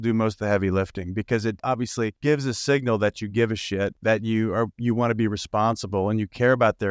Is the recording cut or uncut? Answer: cut